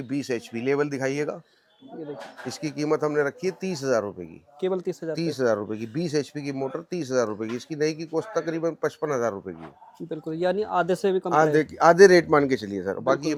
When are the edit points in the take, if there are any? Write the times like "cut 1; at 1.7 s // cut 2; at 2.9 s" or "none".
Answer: none